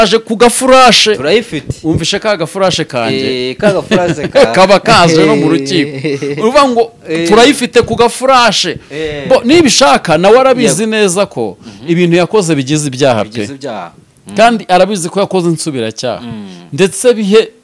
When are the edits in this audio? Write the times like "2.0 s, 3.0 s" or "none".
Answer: none